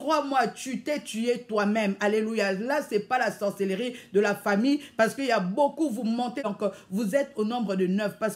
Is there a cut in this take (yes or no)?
yes